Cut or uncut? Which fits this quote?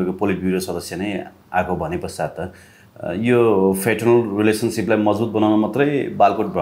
uncut